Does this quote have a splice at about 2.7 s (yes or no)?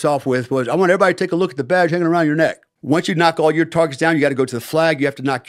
yes